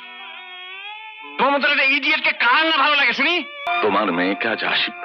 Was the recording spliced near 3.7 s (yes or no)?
yes